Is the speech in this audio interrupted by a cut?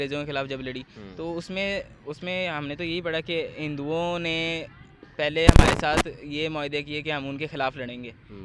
no; 0 cuts

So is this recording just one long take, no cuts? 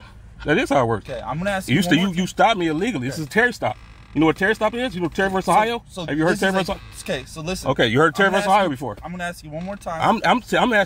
yes; 0 cuts

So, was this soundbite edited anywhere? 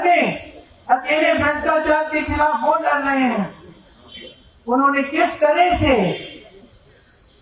no; 0 cuts

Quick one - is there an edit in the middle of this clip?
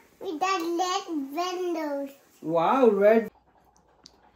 yes; 1 cut; at 3.3 s

